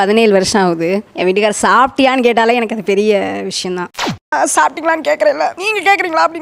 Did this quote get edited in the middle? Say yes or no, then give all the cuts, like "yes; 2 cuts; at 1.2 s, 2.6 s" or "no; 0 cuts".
yes; 1 cut; at 4.0 s